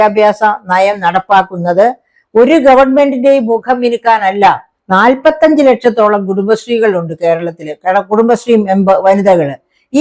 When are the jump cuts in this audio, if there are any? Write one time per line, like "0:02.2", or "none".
0:04.7